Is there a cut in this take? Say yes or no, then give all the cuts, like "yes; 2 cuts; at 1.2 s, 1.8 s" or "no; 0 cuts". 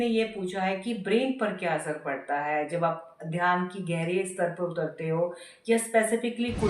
no; 0 cuts